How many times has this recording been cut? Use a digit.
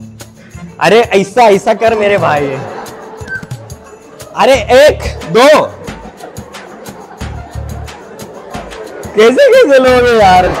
0